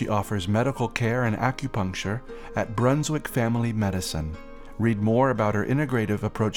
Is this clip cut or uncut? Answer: uncut